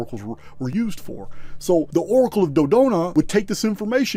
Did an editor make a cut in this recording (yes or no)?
no